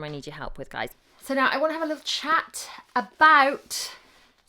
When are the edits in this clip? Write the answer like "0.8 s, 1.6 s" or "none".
0.9 s